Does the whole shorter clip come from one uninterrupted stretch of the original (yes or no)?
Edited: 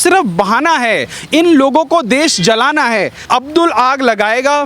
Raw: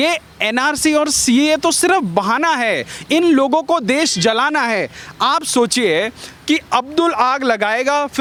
no